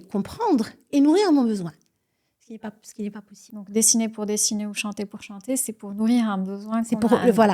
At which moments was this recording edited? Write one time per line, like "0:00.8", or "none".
0:03.4